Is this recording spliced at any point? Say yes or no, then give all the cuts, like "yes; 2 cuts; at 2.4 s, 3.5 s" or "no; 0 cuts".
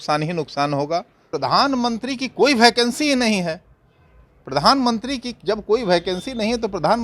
yes; 1 cut; at 1.3 s